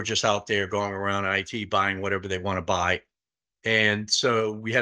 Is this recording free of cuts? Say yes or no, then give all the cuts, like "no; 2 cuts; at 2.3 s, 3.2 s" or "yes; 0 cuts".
yes; 0 cuts